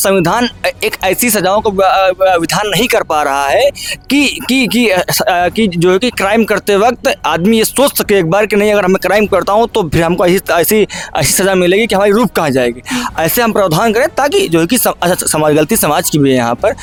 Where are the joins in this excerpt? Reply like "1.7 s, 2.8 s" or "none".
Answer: none